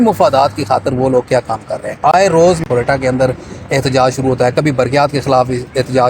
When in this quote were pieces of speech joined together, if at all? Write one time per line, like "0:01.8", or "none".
0:02.6